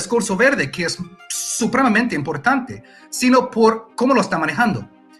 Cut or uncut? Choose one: uncut